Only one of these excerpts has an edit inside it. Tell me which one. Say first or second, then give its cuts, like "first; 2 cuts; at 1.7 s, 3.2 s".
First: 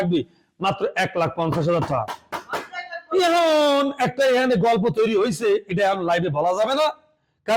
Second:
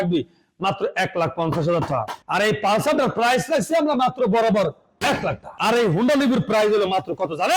second; 2 cuts; at 2.2 s, 5.5 s